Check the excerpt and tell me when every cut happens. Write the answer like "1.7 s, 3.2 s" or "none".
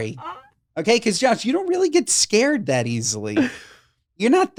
none